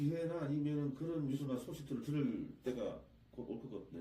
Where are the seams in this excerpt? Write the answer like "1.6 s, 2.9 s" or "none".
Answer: 1.4 s